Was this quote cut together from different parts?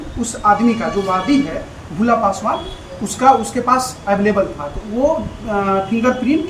no; 0 cuts

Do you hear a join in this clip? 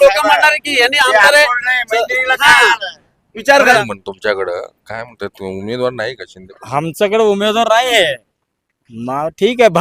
yes; 1 cut; at 3.8 s

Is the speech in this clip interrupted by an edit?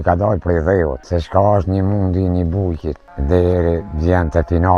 yes; 2 cuts; at 1.0 s, 3.1 s

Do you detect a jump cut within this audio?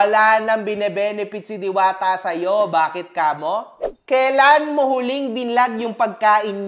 no; 0 cuts

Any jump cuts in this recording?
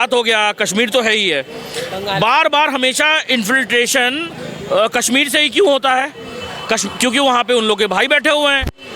no; 0 cuts

